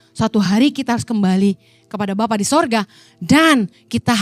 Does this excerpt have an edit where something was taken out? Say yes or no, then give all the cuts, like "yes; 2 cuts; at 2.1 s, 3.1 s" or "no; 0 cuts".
no; 0 cuts